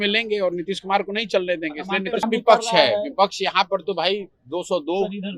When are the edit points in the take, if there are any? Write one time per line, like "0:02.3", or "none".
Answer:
0:02.2